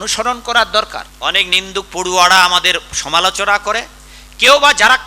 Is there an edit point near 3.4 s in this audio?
no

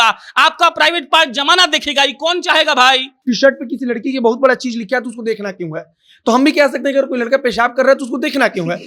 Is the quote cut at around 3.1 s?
yes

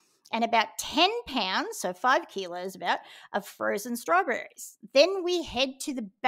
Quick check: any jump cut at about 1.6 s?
no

